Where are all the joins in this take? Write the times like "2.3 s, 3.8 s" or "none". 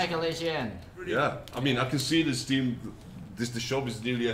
1.5 s